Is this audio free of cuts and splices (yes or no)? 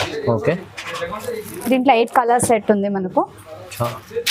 yes